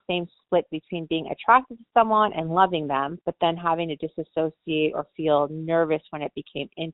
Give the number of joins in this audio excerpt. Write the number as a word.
zero